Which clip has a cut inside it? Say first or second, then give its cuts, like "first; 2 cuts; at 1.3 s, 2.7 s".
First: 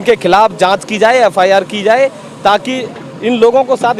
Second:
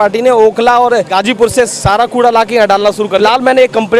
second; 2 cuts; at 1.1 s, 3.2 s